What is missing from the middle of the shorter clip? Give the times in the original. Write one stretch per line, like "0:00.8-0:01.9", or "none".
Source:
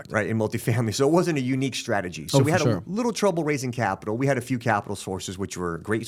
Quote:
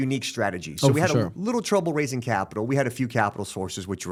none

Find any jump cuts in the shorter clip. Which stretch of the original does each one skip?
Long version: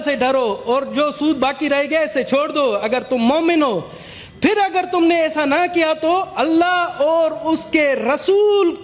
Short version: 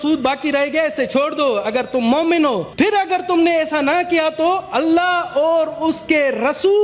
0:03.8-0:04.3

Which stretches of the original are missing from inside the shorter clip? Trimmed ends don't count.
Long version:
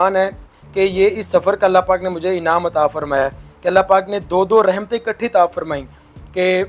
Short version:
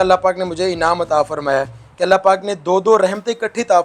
none

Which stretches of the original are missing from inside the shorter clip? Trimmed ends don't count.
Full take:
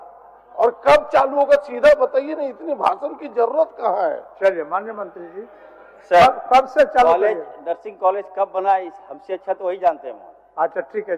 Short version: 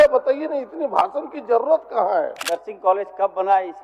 0:04.3-0:07.6

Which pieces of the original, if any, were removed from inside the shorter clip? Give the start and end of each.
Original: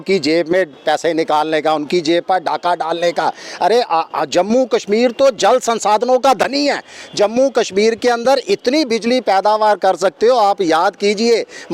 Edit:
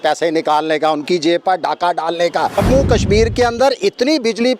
0:03.4-0:07.3

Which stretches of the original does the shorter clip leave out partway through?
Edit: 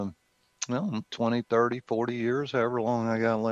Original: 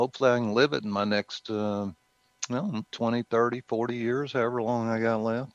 none

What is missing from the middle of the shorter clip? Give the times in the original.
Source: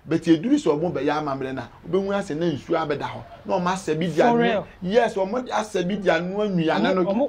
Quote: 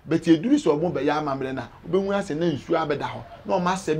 none

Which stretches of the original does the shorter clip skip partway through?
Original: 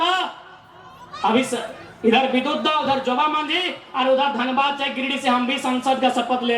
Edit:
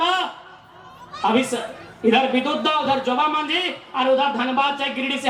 none

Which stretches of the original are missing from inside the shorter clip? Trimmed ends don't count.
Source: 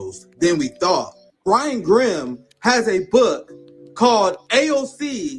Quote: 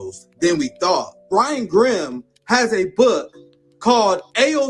0:01.2-0:01.3

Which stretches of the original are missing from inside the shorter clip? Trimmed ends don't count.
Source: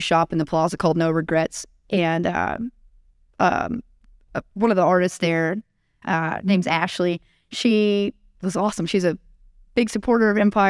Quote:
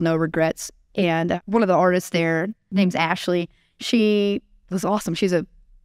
0:02.3-0:04.5
0:05.7-0:06.4

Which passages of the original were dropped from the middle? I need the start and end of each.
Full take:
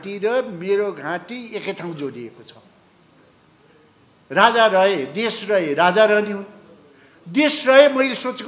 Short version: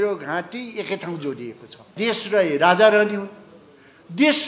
0:02.7-0:05.1

